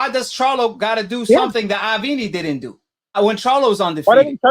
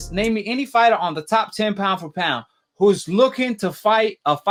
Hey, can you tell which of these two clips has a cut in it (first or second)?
first